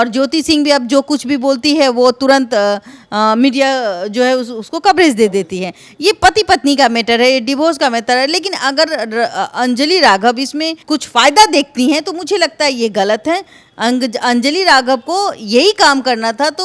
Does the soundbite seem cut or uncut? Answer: uncut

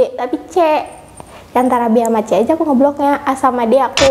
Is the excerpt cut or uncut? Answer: uncut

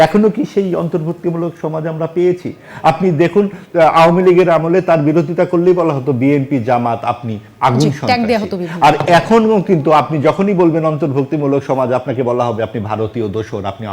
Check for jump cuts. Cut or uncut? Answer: uncut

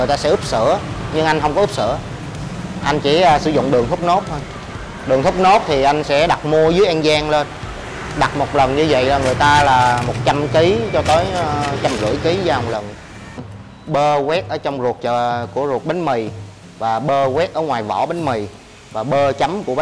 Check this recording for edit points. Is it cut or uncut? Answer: cut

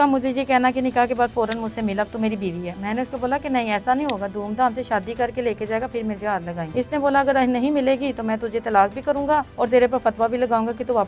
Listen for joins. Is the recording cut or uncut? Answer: uncut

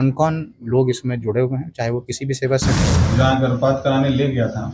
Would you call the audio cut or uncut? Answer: cut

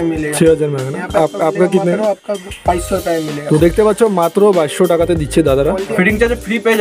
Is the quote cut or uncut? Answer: cut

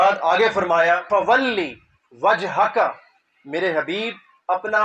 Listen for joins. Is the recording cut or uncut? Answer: cut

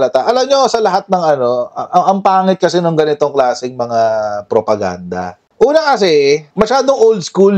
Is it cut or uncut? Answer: cut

